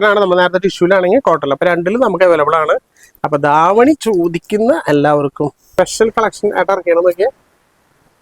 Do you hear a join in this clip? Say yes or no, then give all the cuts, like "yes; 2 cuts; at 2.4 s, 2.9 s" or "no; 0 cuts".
yes; 1 cut; at 5.7 s